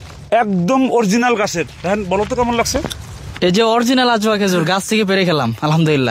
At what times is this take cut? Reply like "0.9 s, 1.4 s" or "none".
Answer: none